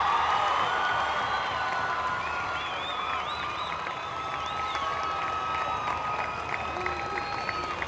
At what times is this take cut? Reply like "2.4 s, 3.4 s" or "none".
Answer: 4.4 s